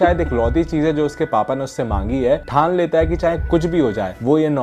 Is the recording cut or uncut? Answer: uncut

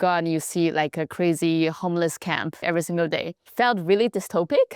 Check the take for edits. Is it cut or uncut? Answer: cut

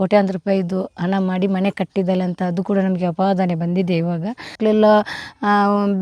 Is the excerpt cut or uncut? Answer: cut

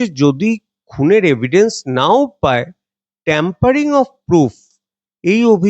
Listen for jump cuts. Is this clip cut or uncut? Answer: uncut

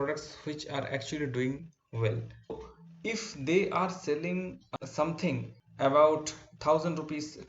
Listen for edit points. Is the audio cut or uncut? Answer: cut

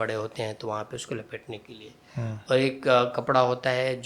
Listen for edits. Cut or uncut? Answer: uncut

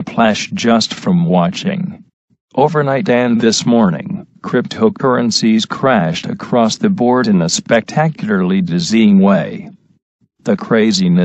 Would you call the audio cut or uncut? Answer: cut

